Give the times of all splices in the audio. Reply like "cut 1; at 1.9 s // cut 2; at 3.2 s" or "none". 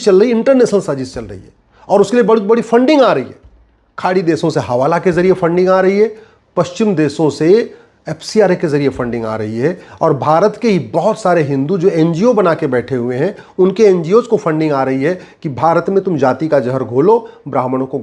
none